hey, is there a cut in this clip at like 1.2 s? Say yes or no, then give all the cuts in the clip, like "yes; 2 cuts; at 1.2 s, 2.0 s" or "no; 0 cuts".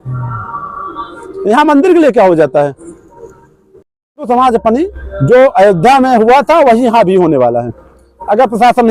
no; 1 cut; at 4.3 s